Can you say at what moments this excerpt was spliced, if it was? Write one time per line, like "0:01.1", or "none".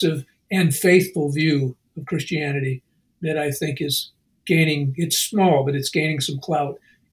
none